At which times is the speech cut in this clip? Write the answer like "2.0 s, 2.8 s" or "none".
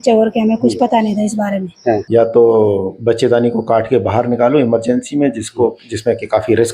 2.0 s